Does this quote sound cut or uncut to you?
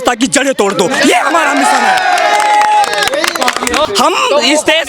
cut